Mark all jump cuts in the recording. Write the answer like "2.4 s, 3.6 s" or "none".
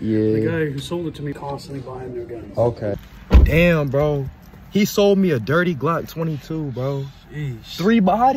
3.1 s